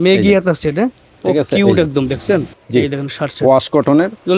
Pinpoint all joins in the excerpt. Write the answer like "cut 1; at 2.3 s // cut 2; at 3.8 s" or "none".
cut 1; at 2.6 s